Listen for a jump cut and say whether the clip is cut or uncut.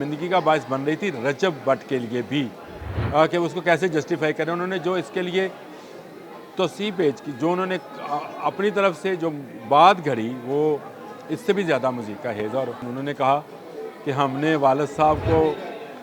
cut